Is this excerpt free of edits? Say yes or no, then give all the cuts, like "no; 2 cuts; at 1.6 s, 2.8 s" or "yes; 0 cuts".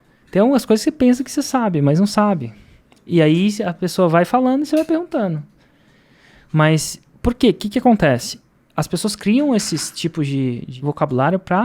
no; 1 cut; at 10.7 s